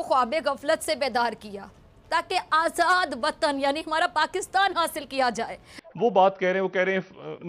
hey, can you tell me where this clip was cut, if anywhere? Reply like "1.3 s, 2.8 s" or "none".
5.8 s